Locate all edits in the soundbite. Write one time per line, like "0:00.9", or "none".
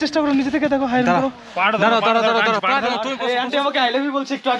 0:03.1